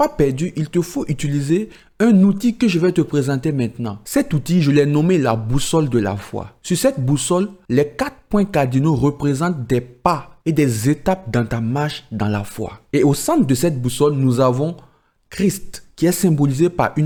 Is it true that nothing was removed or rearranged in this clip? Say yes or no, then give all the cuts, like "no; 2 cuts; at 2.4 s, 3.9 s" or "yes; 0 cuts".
yes; 0 cuts